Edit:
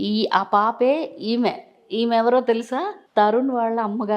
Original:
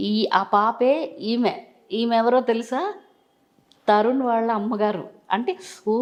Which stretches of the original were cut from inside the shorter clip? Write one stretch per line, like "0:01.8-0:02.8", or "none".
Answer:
0:03.0-0:03.7